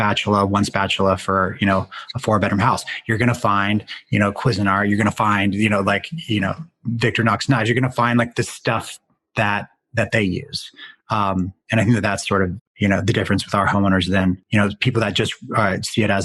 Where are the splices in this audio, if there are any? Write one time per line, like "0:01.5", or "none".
0:12.6
0:14.4